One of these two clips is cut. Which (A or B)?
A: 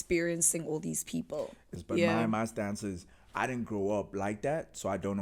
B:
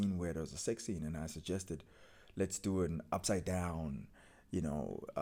A